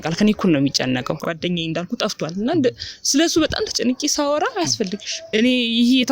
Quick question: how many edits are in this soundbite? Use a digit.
2